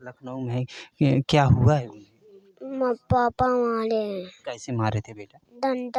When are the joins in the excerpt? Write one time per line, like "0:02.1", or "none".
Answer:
none